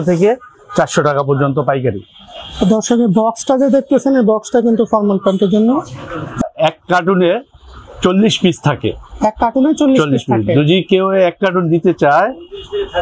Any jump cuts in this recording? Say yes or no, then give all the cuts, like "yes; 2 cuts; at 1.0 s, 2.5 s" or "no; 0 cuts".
yes; 1 cut; at 6.4 s